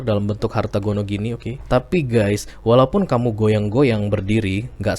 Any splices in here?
yes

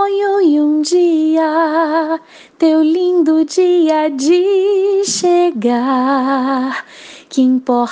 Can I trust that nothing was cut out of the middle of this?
yes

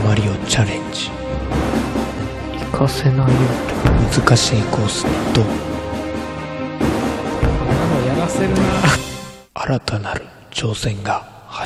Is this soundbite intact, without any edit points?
yes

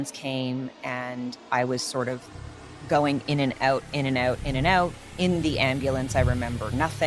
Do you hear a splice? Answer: no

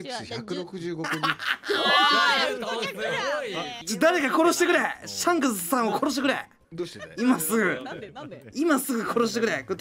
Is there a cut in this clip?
no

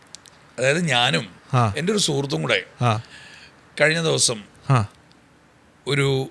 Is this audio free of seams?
yes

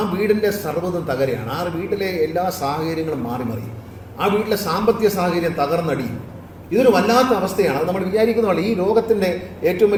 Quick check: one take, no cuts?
yes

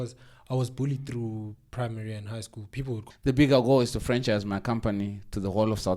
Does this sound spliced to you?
yes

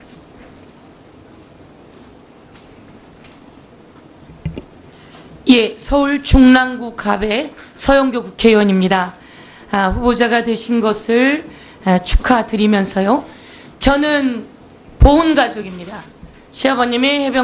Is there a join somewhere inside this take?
no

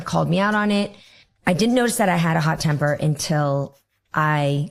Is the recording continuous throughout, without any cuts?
yes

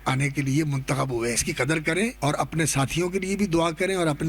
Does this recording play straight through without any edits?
no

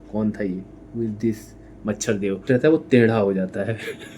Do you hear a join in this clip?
yes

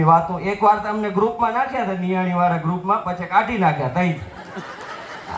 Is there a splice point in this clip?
no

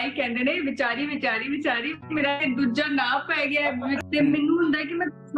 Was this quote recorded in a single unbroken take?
no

